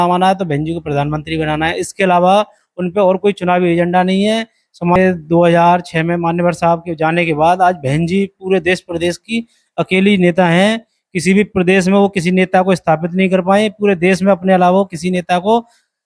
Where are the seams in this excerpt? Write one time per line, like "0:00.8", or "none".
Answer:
0:05.0